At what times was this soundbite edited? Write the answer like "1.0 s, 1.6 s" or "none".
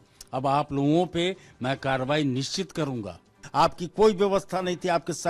3.4 s